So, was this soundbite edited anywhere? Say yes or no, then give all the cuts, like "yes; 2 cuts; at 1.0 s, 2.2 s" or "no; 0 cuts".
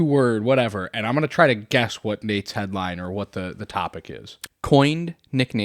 yes; 1 cut; at 4.3 s